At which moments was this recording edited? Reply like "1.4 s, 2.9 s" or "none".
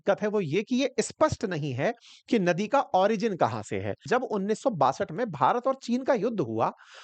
4.0 s